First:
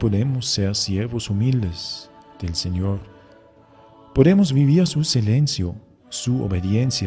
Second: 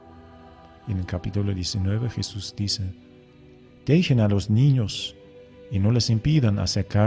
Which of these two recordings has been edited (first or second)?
second